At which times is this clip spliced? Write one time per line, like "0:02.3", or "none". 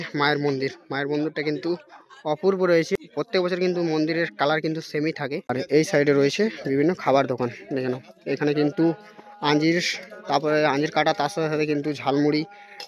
0:03.1
0:05.5

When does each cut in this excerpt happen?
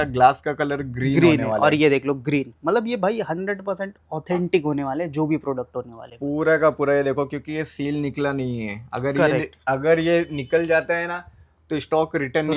none

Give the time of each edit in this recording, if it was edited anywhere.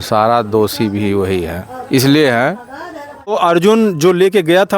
0:03.3

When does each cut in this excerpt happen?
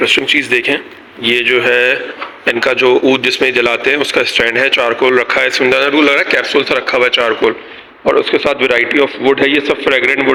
none

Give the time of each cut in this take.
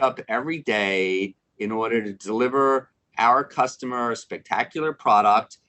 none

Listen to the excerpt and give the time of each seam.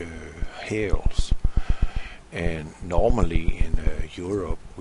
none

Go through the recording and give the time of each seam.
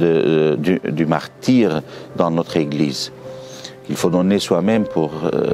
none

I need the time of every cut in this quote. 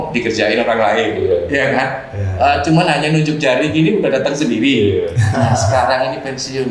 none

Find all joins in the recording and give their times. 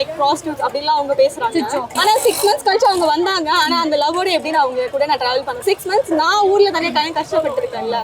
0:01.9
0:05.6

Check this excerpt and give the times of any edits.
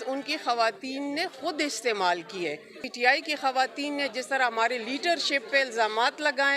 0:02.8

